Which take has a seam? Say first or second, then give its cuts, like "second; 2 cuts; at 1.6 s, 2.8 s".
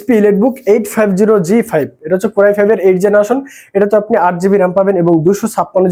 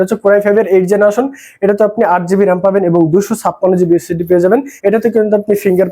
second; 1 cut; at 4.7 s